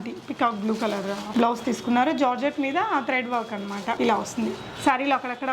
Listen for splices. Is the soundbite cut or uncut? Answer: cut